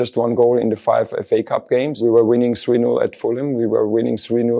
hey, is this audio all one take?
no; 1 cut; at 2.0 s

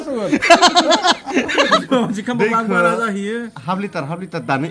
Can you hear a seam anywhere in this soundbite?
yes; 1 cut; at 1.8 s

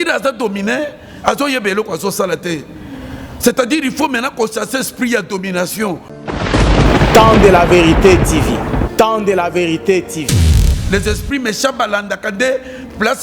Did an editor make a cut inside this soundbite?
yes; 2 cuts; at 6.1 s, 10.7 s

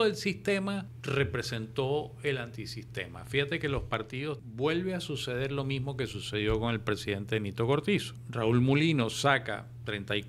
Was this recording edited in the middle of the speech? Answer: yes; 3 cuts; at 0.9 s, 4.4 s, 8.2 s

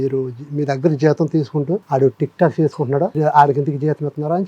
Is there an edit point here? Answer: yes; 2 cuts; at 1.8 s, 3.2 s

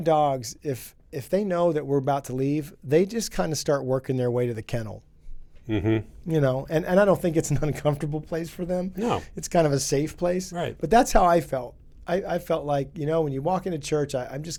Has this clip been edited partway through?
no; 0 cuts

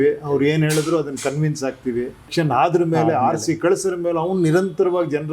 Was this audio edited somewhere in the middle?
yes; 1 cut; at 2.3 s

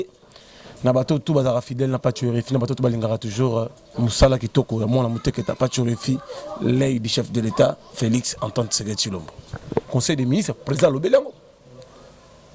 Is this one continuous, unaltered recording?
no; 1 cut; at 9.9 s

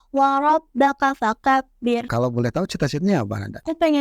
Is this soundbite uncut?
no; 1 cut; at 2.1 s

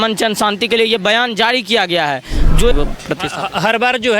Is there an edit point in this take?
yes; 1 cut; at 2.7 s

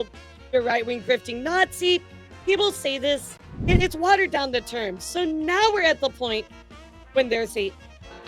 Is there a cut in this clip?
yes; 1 cut; at 3.5 s

